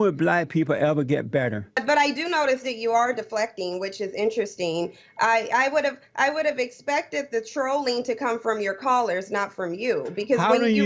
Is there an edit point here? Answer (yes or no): yes